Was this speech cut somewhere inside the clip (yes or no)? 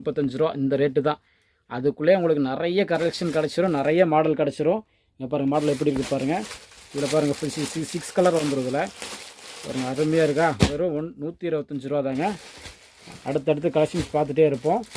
no